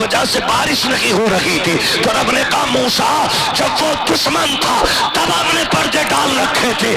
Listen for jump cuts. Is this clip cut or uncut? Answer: uncut